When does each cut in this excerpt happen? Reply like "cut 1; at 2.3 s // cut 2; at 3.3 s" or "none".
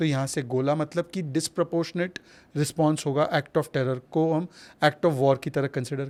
none